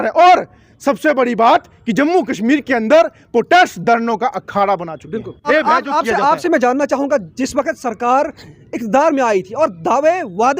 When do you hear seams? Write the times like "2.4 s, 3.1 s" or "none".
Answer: 5.4 s